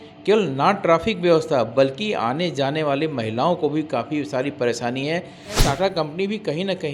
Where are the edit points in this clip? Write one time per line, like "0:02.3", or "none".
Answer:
0:05.6